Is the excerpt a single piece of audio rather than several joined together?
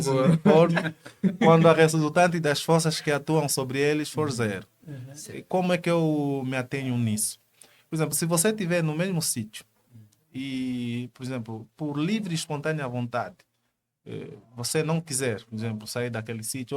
yes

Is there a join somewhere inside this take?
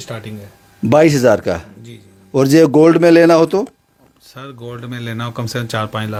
no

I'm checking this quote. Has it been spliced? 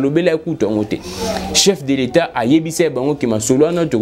no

